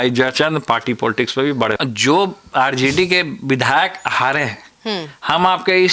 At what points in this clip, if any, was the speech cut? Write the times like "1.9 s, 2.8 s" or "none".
1.8 s